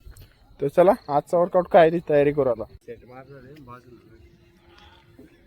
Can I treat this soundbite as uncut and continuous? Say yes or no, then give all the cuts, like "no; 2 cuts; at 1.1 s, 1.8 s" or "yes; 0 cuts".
no; 1 cut; at 2.8 s